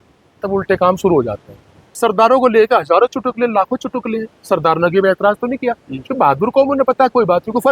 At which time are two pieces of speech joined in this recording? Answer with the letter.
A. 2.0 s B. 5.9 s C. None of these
A